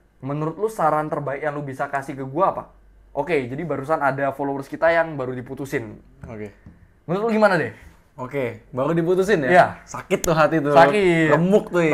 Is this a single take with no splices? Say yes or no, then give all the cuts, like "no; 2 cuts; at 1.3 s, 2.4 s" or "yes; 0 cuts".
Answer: yes; 0 cuts